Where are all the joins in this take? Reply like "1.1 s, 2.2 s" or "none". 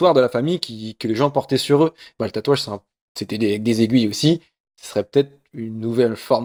none